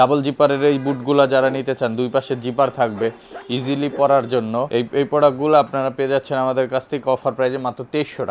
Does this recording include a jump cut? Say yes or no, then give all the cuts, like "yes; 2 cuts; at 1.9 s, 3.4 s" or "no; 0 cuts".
no; 0 cuts